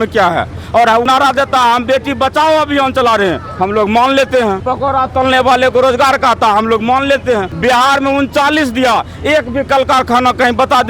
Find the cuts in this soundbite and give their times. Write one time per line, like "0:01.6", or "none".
0:01.1
0:04.7
0:07.5